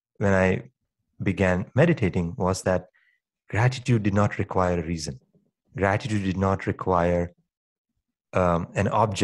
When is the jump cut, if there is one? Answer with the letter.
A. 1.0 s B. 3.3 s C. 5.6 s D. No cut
A